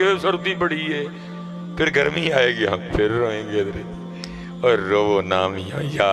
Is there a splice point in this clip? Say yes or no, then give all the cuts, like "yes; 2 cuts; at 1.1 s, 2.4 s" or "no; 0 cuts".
no; 0 cuts